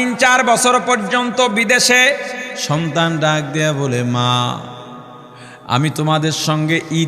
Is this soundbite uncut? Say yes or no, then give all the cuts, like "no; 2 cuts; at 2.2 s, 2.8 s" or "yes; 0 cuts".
no; 1 cut; at 2.5 s